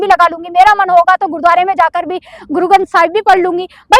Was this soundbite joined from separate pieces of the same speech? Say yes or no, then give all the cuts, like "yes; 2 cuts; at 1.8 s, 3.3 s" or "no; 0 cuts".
no; 0 cuts